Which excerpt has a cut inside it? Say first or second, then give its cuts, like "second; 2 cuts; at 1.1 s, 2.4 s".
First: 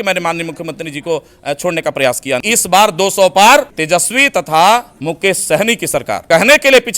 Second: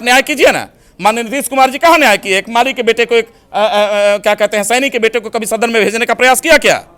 first; 4 cuts; at 2.4 s, 3.8 s, 4.9 s, 6.1 s